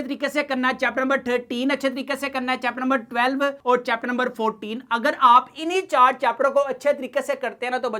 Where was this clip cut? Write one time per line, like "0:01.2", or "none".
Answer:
none